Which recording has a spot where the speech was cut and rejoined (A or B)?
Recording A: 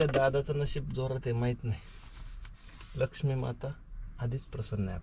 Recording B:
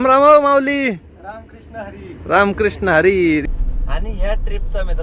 B